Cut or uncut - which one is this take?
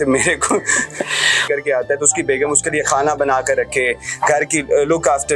uncut